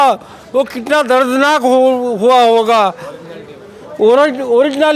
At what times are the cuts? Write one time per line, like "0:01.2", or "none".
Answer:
none